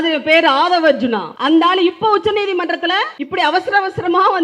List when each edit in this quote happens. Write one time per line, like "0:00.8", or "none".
0:01.3
0:03.2